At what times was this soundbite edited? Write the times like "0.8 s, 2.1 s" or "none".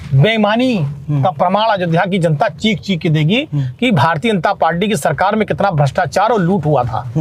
none